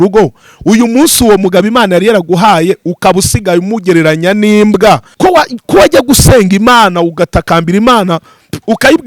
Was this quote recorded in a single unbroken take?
no; 1 cut; at 5.1 s

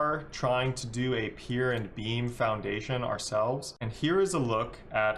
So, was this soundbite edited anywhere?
yes; 1 cut; at 3.7 s

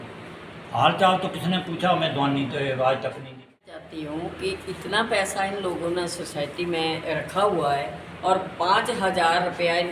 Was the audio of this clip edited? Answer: yes; 1 cut; at 3.9 s

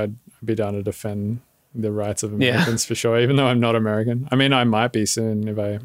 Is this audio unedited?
yes; 0 cuts

